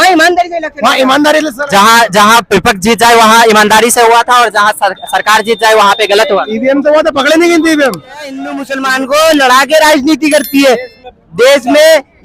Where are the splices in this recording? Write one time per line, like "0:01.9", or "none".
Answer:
0:08.6